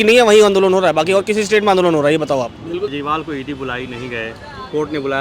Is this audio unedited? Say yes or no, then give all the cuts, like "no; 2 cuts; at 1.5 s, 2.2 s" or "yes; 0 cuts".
no; 1 cut; at 3.0 s